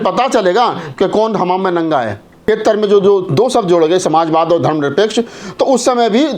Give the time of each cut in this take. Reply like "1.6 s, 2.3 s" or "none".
2.4 s